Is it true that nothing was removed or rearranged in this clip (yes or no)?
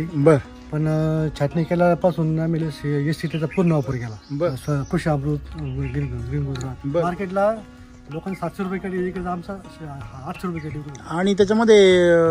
no